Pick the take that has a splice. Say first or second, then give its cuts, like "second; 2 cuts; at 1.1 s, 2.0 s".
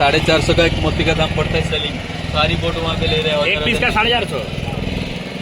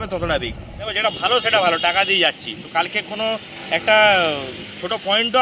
second; 1 cut; at 1.0 s